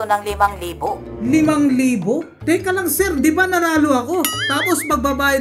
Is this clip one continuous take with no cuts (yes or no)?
no